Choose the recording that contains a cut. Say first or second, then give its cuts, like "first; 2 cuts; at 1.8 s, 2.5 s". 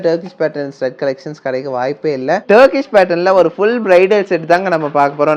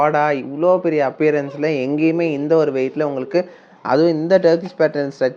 first; 1 cut; at 2.4 s